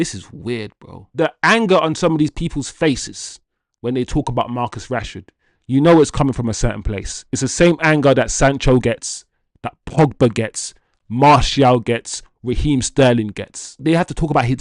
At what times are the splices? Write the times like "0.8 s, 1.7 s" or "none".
1.1 s, 13.8 s